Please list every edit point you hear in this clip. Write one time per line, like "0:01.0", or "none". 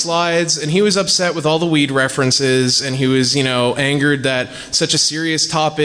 0:02.9